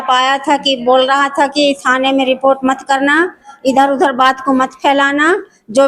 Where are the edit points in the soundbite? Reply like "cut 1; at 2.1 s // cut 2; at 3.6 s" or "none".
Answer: none